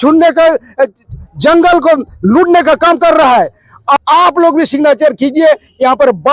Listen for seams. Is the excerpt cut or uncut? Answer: cut